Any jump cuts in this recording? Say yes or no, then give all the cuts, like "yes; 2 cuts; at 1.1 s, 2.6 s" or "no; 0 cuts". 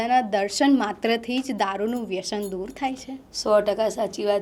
no; 0 cuts